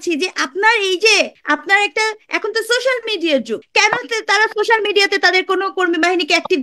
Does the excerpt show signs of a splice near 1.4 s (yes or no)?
yes